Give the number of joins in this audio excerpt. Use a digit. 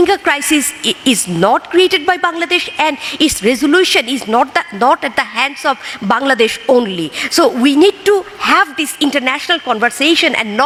0